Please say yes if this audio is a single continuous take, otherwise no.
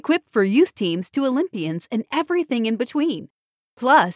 yes